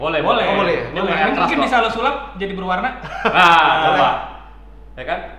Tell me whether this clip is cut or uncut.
uncut